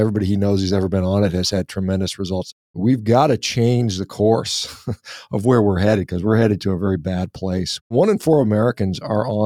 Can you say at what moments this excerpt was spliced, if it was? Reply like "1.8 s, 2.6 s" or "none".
2.7 s, 7.9 s